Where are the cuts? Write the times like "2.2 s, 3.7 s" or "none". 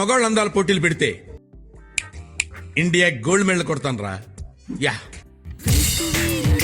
5.4 s